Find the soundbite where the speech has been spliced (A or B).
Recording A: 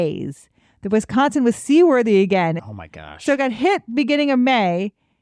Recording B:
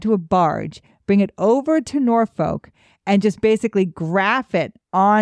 A